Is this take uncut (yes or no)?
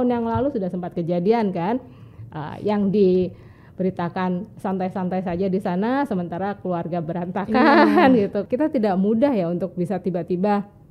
no